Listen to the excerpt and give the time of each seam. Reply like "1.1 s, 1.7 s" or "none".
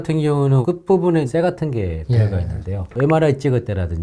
1.3 s, 2.9 s